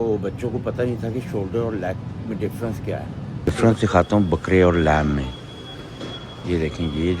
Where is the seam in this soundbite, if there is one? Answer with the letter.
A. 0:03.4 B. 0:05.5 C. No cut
A